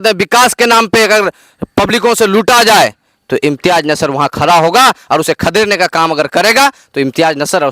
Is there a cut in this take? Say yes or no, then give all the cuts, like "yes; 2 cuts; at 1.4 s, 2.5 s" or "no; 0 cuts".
no; 0 cuts